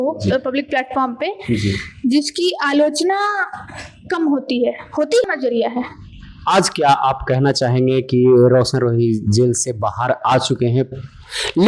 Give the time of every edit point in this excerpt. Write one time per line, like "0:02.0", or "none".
0:05.2